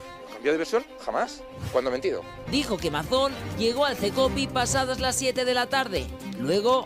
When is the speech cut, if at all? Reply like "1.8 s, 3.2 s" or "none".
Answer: 2.4 s